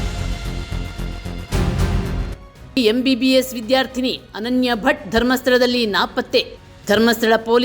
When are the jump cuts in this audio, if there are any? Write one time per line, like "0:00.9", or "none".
0:02.4